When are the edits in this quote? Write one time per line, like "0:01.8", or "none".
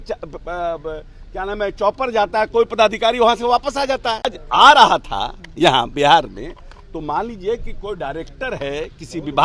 0:04.3